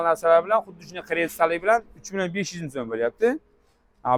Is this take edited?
no; 0 cuts

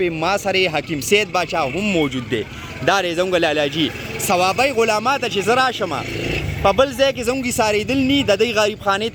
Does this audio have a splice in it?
no; 0 cuts

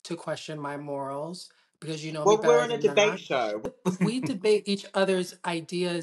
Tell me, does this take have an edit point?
yes; 1 cut; at 3.6 s

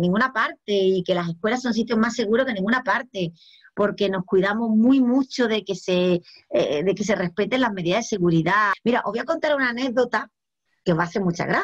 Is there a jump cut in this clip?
yes; 1 cut; at 8.7 s

